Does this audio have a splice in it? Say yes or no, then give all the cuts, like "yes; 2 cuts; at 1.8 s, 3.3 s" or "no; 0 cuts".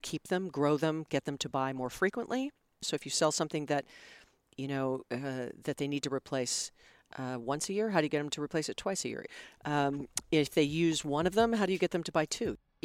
yes; 2 cuts; at 2.9 s, 9.2 s